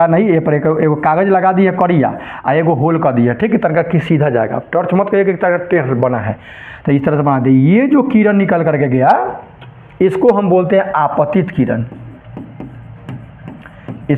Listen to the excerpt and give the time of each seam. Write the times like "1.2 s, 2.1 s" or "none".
none